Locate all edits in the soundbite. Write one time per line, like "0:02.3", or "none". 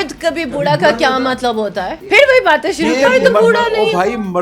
0:01.9
0:03.0